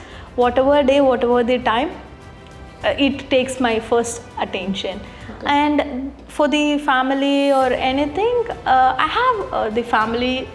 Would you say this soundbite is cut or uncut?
uncut